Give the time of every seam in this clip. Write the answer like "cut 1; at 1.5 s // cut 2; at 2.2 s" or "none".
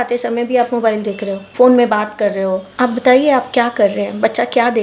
cut 1; at 1.4 s // cut 2; at 2.7 s